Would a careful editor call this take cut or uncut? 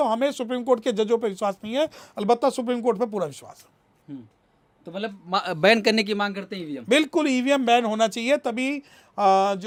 uncut